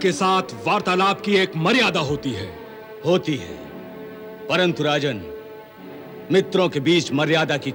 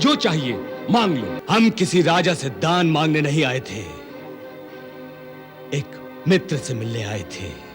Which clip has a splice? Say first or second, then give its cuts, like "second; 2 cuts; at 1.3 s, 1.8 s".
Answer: second; 1 cut; at 1.4 s